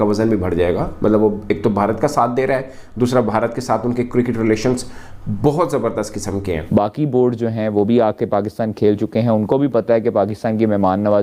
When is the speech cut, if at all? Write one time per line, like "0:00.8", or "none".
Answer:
0:06.8